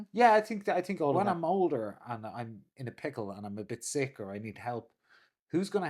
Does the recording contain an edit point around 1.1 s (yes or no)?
yes